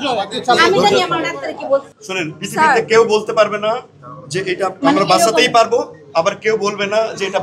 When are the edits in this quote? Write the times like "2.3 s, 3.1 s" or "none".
2.0 s